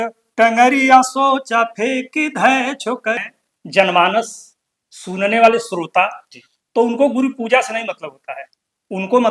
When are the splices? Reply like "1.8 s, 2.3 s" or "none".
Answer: 3.3 s